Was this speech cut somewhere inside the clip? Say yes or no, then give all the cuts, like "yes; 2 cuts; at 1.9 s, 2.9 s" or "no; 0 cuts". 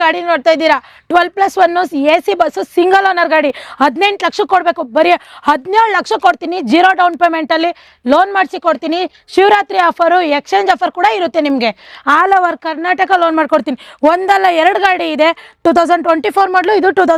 no; 0 cuts